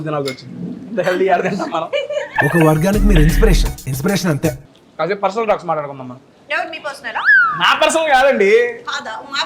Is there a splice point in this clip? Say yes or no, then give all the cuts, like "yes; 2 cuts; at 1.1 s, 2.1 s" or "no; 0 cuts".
yes; 2 cuts; at 4.6 s, 7.4 s